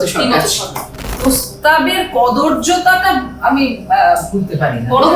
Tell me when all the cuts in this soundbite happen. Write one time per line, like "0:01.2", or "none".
0:01.2